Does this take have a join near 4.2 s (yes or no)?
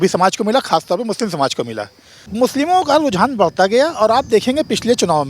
no